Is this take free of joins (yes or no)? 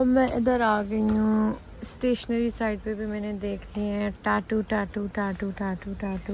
yes